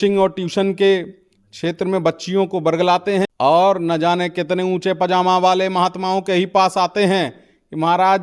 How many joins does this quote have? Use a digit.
1